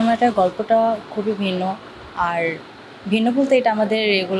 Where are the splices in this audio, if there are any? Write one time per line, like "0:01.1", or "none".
none